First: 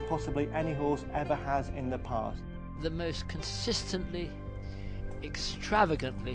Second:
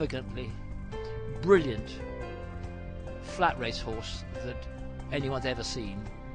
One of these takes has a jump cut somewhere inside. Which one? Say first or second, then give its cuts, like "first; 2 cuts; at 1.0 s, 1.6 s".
first; 1 cut; at 2.5 s